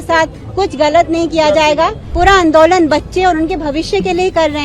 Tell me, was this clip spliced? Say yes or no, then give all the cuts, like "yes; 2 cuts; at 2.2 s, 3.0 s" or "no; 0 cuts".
yes; 1 cut; at 2.0 s